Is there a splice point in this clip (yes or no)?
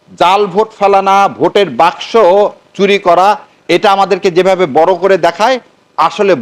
no